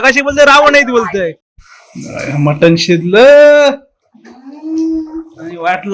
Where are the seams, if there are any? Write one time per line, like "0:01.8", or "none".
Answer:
0:01.4

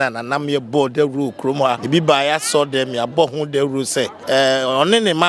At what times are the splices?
0:01.8
0:04.2

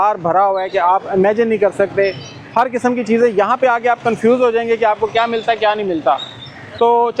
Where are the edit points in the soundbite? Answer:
none

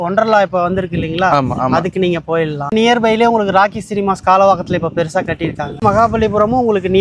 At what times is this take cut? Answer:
0:02.7
0:05.8

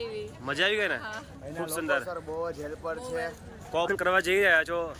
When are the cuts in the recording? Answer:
0:03.9

